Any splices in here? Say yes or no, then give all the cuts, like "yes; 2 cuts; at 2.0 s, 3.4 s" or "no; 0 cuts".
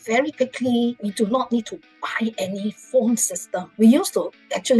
yes; 2 cuts; at 1.0 s, 3.6 s